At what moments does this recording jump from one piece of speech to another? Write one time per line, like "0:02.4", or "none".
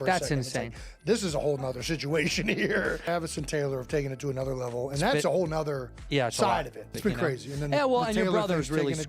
0:06.9

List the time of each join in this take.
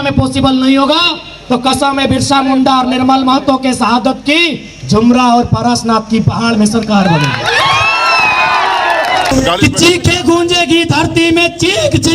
0:09.3

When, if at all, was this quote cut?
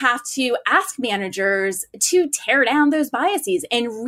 none

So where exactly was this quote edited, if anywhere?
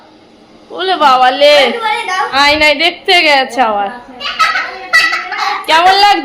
0:02.3

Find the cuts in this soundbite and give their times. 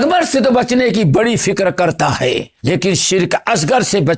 0:02.2

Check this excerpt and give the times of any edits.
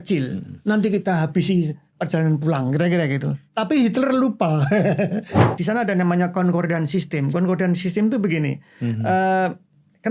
0:05.4

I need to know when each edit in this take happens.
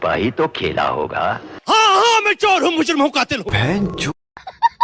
0:03.5

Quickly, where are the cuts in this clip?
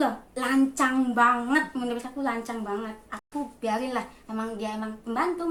none

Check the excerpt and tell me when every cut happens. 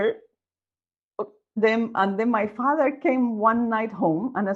0:01.6

